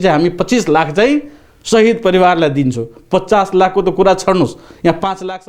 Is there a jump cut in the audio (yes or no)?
no